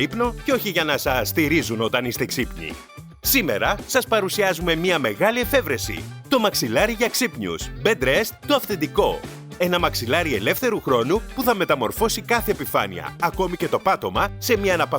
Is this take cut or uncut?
cut